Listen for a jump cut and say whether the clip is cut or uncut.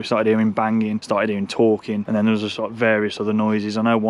cut